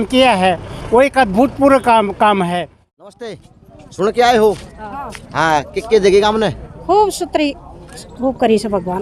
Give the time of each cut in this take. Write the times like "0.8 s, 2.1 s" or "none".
3.3 s